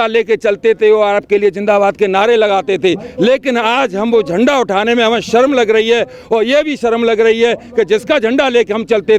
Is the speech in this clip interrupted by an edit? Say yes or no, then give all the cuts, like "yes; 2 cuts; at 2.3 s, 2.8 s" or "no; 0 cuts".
no; 0 cuts